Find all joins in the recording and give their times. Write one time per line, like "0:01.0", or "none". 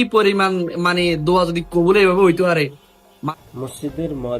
0:03.2